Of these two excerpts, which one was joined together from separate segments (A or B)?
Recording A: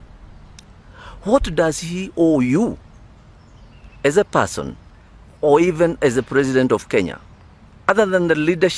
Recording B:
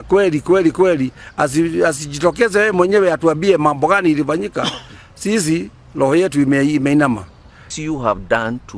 B